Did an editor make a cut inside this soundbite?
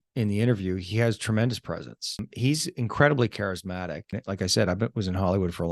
yes; 2 cuts; at 2.2 s, 4.1 s

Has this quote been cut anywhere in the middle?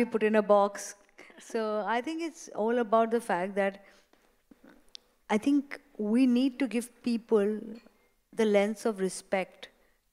no; 0 cuts

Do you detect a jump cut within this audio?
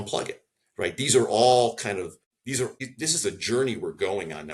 no; 0 cuts

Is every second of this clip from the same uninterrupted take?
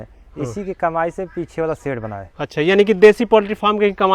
yes; 0 cuts

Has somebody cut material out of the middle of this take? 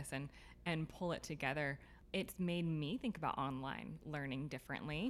yes; 1 cut; at 1.9 s

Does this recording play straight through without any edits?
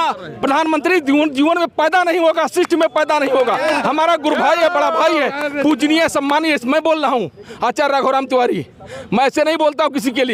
yes; 0 cuts

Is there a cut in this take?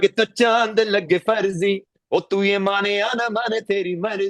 no; 0 cuts

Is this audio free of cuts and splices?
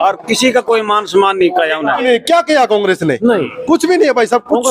no; 1 cut; at 2.1 s

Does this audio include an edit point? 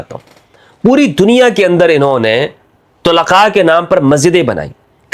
no; 0 cuts

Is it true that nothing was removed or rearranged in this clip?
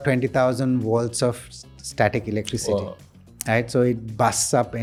yes; 0 cuts

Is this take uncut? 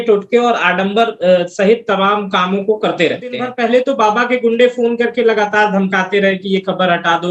no; 1 cut; at 3.5 s

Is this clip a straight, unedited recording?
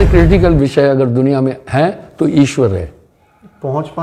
yes; 0 cuts

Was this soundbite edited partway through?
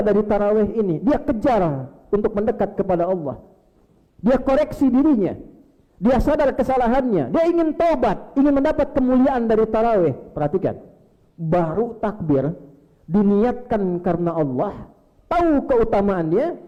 no; 0 cuts

